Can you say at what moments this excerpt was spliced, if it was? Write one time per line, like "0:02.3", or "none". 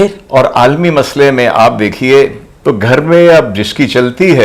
0:02.5